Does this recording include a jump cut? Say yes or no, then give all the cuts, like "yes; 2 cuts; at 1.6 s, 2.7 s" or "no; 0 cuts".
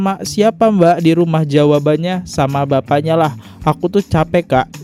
no; 0 cuts